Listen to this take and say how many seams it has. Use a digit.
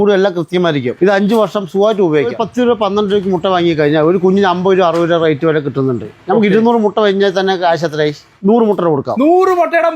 3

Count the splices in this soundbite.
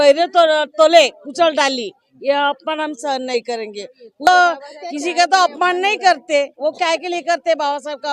1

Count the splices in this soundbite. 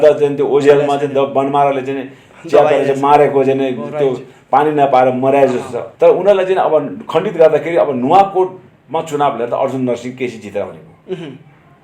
1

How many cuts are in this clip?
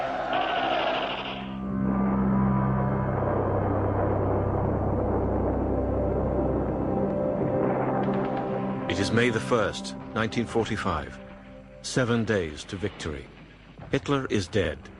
1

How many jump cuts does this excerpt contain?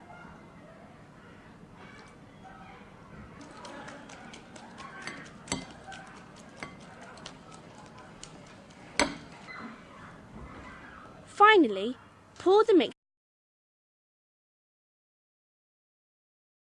0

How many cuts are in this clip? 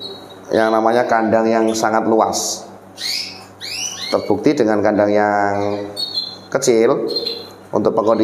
0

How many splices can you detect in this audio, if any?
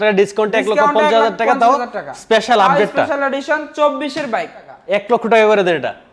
1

